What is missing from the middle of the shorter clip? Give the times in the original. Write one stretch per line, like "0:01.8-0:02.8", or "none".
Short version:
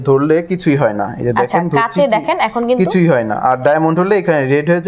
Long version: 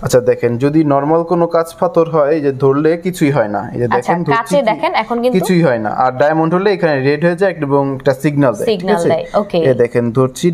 none